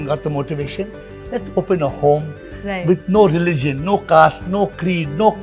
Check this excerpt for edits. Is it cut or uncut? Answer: uncut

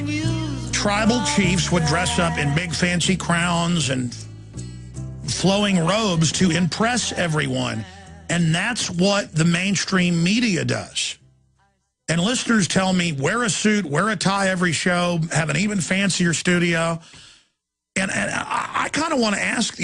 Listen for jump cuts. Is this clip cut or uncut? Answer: uncut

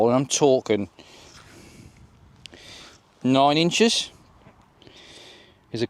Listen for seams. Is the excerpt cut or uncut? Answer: cut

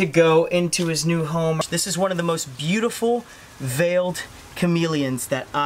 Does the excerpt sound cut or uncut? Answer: cut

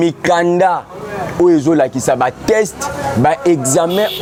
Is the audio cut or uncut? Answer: uncut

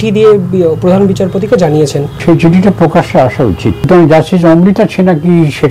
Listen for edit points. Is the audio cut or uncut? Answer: cut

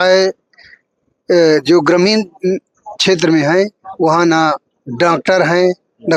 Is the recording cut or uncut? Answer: uncut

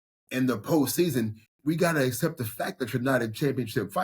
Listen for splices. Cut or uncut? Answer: cut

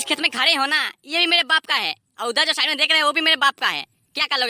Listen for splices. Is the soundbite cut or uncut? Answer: uncut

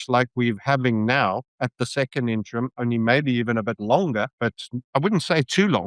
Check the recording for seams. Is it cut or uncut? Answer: cut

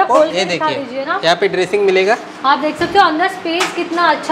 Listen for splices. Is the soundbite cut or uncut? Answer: uncut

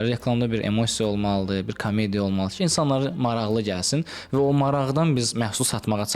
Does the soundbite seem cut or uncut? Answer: uncut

